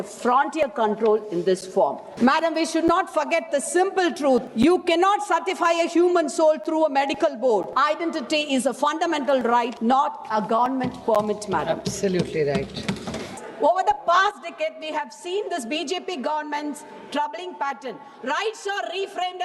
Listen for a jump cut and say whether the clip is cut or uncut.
cut